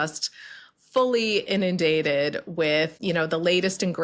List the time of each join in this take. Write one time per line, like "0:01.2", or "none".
0:03.0